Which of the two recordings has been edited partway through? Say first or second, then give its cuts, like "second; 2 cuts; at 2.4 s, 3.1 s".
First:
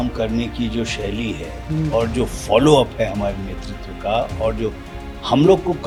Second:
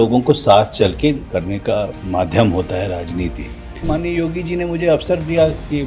second; 2 cuts; at 2.0 s, 3.8 s